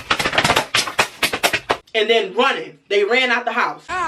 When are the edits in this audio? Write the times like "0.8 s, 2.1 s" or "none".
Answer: none

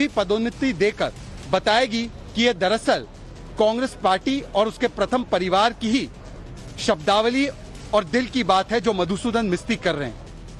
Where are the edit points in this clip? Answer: none

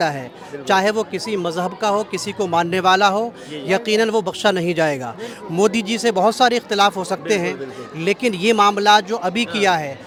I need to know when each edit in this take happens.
none

